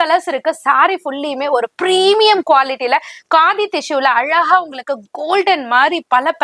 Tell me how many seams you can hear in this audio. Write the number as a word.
zero